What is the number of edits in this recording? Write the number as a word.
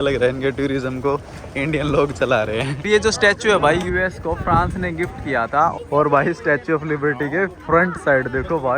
two